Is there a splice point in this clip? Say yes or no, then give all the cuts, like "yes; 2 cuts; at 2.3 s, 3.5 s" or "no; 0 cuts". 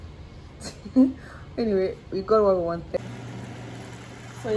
yes; 1 cut; at 3.0 s